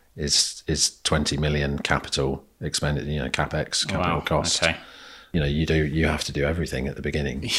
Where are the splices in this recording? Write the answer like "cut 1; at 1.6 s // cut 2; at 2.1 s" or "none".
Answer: cut 1; at 5.2 s